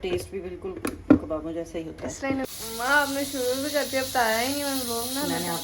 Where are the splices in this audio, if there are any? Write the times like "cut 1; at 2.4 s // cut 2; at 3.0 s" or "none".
cut 1; at 2.5 s